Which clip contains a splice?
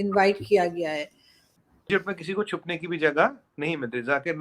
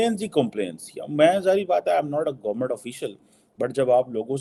first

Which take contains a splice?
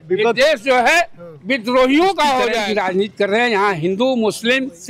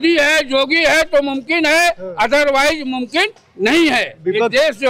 first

